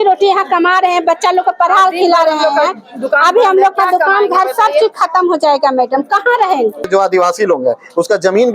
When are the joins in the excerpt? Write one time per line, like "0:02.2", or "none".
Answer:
0:06.9